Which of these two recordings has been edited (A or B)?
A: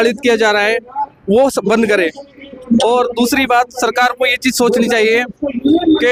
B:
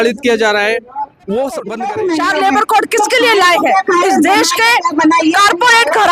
B